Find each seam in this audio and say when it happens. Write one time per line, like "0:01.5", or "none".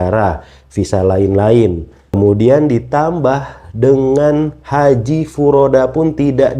0:02.2